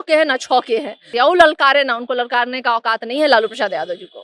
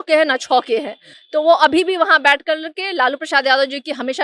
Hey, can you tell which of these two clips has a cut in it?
first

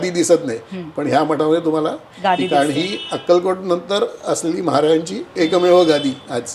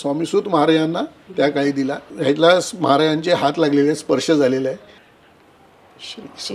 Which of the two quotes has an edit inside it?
second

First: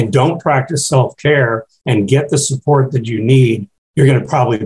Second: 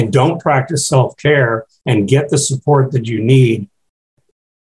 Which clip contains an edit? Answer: first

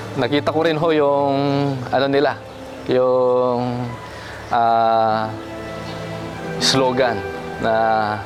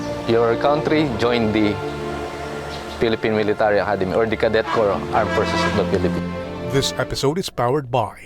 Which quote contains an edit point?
second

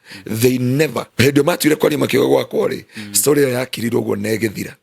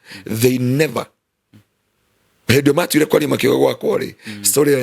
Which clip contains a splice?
first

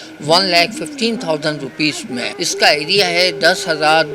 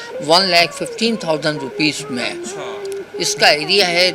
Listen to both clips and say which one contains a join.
first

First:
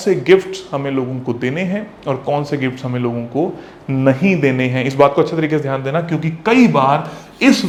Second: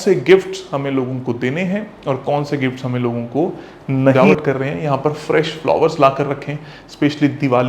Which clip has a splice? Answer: second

